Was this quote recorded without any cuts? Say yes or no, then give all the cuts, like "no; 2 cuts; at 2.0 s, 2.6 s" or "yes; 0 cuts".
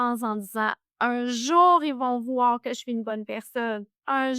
yes; 0 cuts